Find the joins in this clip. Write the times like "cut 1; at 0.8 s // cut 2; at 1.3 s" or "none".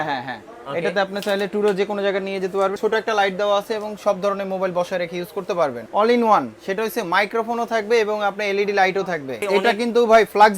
cut 1; at 2.8 s // cut 2; at 5.8 s // cut 3; at 9.4 s